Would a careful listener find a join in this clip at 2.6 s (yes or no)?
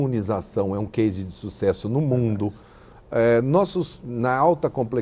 no